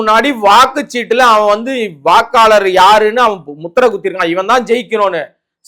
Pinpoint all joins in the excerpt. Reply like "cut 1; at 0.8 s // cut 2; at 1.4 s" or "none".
none